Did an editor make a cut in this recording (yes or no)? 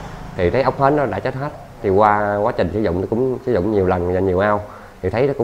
no